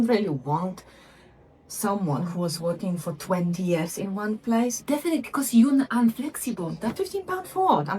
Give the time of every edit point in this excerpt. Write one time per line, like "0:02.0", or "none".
0:06.9